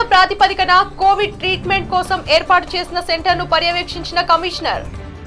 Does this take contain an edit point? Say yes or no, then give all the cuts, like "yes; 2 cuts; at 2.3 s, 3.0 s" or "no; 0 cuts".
no; 0 cuts